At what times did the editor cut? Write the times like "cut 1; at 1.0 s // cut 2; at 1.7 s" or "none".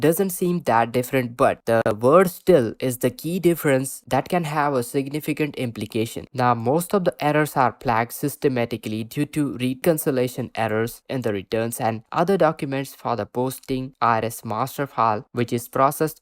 cut 1; at 6.2 s